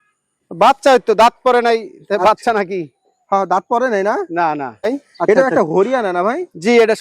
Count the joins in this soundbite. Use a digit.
1